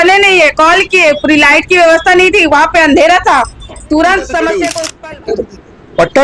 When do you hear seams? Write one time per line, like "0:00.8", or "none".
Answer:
0:04.7